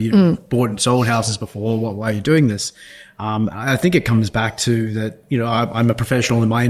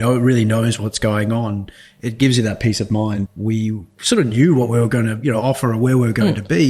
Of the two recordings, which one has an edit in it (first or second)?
second